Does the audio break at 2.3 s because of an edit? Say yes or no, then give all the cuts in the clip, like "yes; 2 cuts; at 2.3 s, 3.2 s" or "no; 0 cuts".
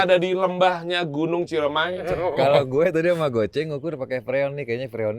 yes; 1 cut; at 2.3 s